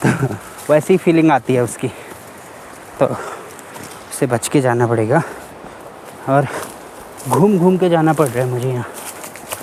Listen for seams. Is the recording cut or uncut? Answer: uncut